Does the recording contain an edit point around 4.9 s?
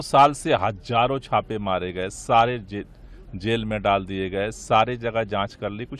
no; 0 cuts

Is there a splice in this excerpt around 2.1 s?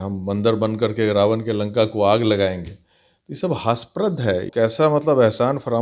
no; 1 cut; at 4.5 s

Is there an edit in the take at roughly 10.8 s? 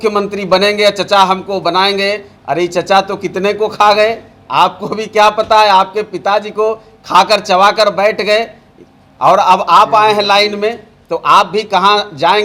no; 0 cuts

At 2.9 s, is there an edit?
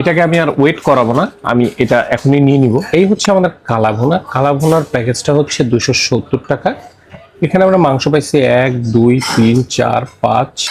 yes; 1 cut; at 2.9 s

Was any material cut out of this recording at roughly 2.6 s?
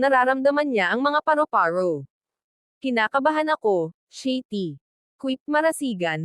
yes; 1 cut; at 2.6 s

